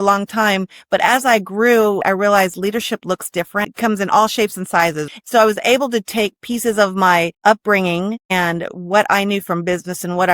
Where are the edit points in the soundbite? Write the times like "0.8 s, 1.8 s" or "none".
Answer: 2.0 s, 3.7 s, 5.1 s, 7.3 s, 8.2 s